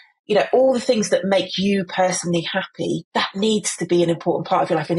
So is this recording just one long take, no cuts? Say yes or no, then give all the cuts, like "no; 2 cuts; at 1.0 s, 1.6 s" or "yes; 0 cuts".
no; 1 cut; at 3.0 s